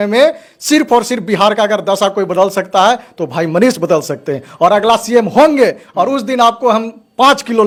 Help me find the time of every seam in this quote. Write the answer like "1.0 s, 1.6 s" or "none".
none